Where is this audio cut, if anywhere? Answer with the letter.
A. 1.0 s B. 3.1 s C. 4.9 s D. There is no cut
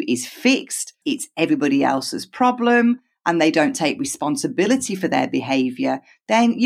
A